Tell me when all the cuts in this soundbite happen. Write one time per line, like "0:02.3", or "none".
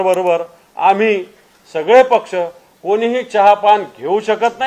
none